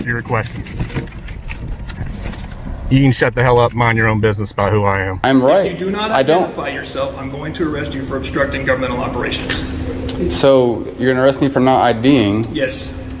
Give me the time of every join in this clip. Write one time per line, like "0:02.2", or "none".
0:05.1